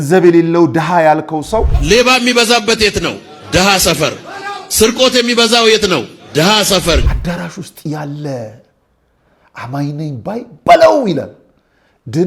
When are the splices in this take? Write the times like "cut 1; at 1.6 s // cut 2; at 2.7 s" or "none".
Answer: cut 1; at 1.8 s // cut 2; at 7.1 s